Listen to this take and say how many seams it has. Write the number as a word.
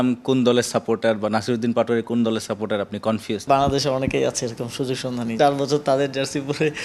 two